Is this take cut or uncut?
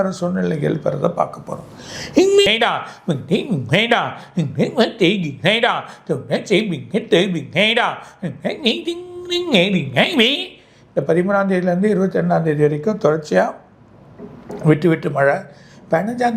cut